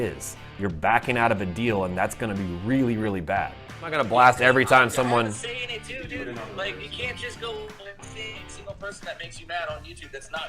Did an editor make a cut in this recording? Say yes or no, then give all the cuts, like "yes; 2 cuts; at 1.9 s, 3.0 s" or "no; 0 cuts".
yes; 1 cut; at 3.9 s